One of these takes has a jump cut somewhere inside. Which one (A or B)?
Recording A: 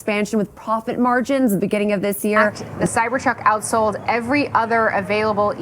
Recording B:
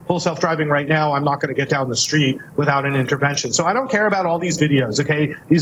A